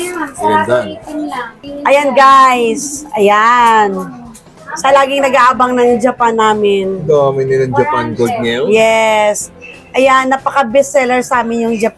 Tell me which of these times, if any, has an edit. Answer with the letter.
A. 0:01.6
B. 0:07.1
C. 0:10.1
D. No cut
A